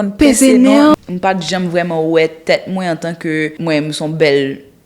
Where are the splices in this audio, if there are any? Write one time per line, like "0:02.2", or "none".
0:00.9
0:03.6